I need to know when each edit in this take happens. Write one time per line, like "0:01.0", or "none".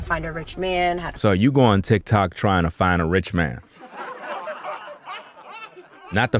none